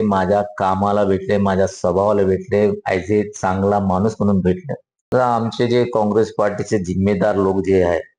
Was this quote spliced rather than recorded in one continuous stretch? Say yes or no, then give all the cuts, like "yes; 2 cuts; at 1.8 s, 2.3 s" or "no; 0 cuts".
yes; 1 cut; at 5.1 s